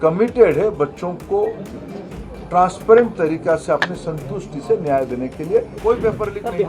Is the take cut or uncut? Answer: cut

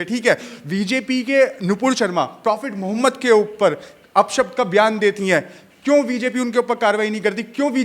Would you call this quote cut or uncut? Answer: uncut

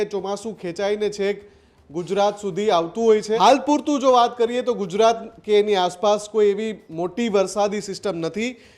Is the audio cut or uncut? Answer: cut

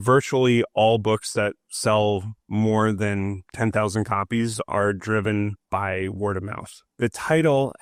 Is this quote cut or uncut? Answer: uncut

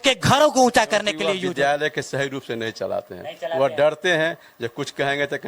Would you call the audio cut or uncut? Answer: cut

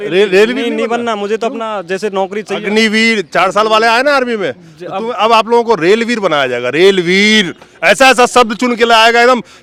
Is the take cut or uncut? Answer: uncut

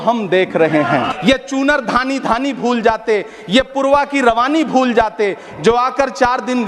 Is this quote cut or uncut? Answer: cut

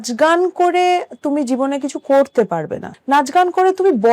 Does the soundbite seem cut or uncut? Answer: cut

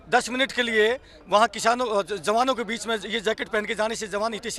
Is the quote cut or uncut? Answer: uncut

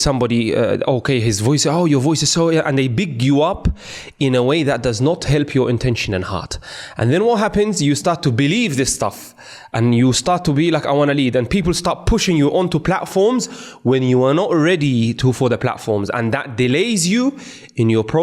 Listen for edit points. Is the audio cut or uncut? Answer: uncut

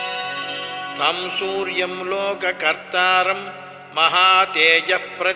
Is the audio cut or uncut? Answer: uncut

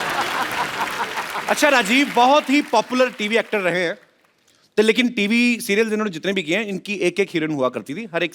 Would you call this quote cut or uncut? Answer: cut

